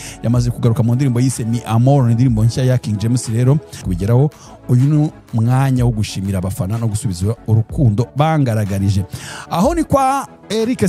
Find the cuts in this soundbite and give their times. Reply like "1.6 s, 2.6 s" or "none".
3.8 s